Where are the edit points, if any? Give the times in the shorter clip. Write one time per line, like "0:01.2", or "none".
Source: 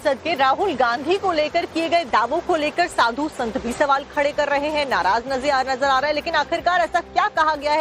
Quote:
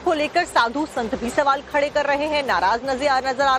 none